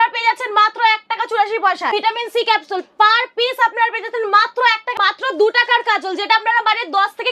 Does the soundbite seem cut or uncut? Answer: cut